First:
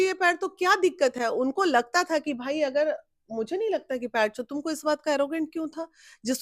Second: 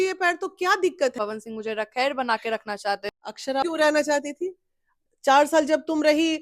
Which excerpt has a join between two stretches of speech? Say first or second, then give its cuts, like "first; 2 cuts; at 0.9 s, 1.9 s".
second; 2 cuts; at 1.1 s, 3.6 s